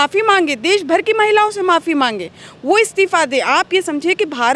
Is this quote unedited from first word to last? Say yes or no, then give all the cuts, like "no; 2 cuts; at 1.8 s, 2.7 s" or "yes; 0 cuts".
yes; 0 cuts